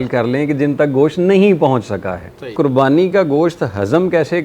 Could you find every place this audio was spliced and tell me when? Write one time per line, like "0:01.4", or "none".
0:02.5